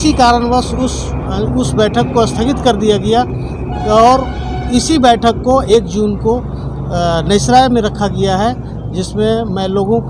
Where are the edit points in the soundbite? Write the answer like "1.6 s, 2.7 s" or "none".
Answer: none